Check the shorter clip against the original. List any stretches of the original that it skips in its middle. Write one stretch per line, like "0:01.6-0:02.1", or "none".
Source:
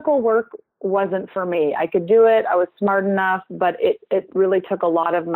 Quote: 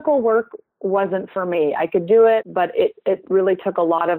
0:02.4-0:03.5